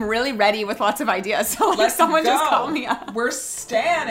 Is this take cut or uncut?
uncut